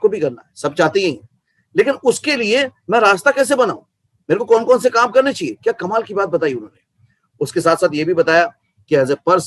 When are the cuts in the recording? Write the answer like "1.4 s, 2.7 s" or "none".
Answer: none